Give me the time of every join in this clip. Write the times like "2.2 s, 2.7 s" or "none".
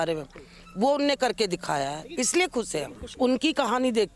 3.1 s